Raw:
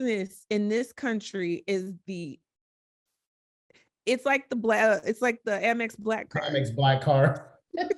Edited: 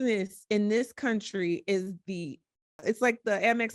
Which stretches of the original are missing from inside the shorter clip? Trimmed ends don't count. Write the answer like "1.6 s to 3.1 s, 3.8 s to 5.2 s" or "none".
2.8 s to 5.0 s